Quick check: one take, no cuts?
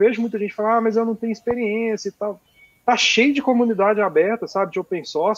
yes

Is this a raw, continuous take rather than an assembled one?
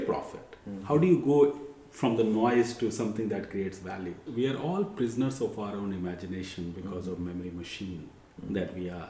no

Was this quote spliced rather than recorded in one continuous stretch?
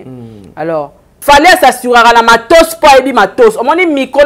yes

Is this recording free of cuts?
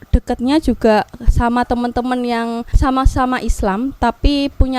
no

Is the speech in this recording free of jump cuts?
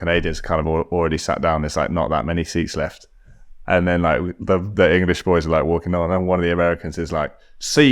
yes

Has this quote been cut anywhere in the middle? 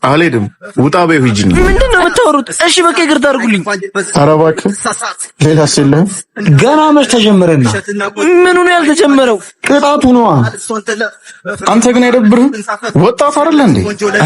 yes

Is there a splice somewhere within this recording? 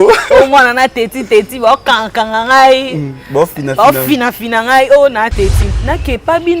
yes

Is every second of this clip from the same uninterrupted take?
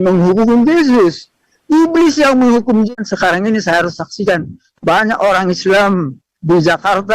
no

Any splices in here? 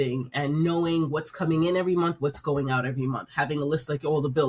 no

